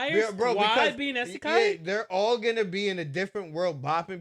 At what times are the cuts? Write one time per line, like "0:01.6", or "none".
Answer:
none